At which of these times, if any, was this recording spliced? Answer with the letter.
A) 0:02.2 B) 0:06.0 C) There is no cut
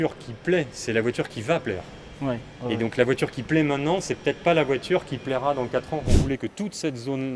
B